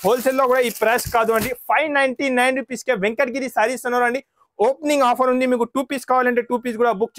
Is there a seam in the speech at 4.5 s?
no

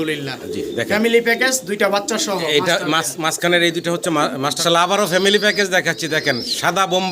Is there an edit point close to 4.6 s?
yes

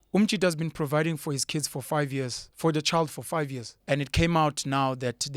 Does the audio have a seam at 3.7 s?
yes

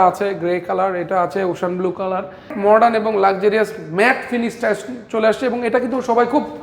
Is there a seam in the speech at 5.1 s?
no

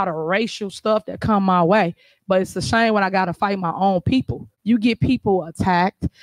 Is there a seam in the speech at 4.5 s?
yes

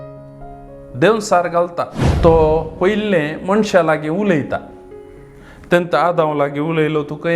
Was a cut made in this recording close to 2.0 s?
yes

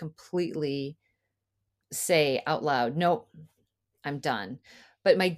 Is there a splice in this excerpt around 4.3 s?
no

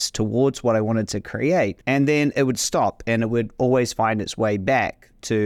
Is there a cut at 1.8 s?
yes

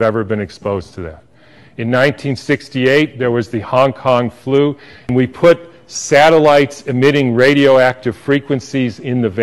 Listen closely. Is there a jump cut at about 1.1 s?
no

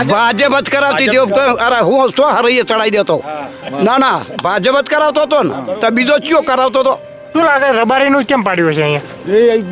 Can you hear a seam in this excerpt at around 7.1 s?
yes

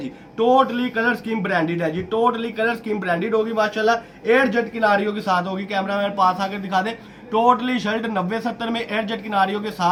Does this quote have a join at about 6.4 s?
no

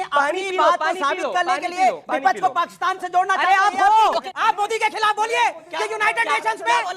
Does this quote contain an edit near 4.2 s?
yes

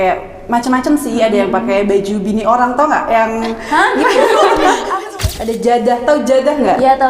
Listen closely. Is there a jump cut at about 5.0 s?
yes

